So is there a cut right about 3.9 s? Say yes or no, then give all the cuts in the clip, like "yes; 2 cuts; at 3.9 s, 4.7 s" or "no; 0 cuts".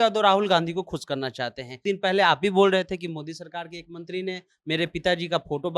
no; 1 cut; at 1.8 s